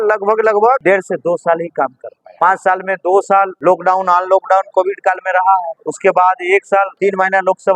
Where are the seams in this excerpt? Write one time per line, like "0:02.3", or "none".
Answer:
0:00.8
0:02.2
0:03.5
0:05.8
0:06.9